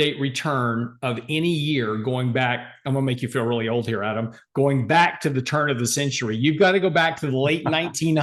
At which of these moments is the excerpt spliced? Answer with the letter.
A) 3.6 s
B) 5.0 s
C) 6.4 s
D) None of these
D